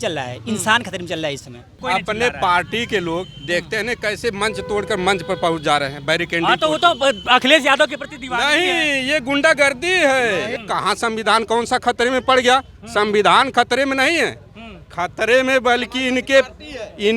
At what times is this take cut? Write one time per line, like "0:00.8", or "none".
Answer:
0:01.8
0:10.5